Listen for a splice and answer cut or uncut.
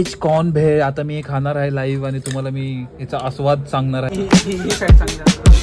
cut